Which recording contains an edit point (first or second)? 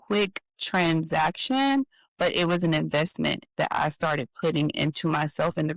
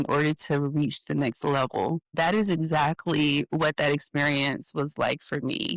second